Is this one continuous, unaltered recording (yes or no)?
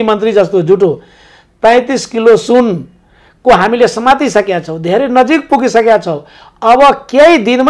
yes